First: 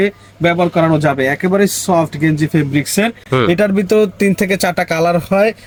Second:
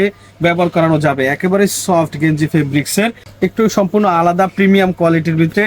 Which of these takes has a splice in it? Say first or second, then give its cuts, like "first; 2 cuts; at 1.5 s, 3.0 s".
second; 1 cut; at 3.2 s